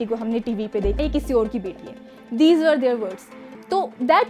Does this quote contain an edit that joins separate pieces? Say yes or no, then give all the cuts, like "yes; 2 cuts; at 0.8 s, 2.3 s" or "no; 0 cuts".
yes; 1 cut; at 1.0 s